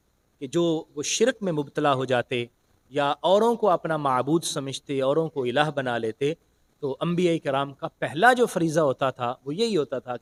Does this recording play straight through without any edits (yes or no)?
yes